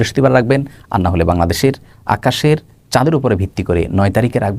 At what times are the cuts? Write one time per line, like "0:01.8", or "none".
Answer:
none